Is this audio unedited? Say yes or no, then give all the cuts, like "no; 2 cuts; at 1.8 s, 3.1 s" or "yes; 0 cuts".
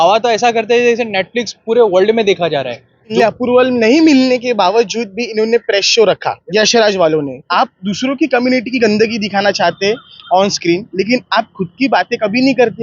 no; 3 cuts; at 3.1 s, 6.4 s, 7.4 s